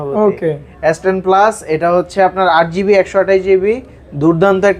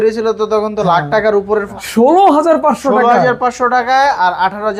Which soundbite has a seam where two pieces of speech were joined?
second; 1 cut; at 1.7 s

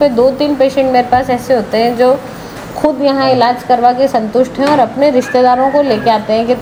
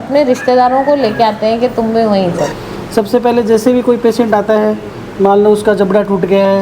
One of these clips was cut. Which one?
second; 1 cut; at 2.7 s

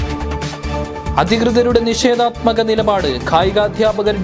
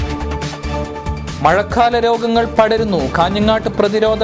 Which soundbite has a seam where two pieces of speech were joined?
first; 1 cut; at 1.0 s

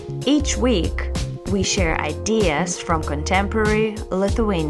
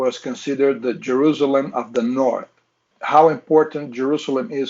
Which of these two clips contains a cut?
second; 1 cut; at 2.9 s

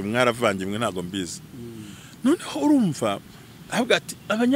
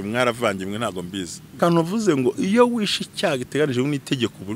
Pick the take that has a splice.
second; 1 cut; at 1.6 s

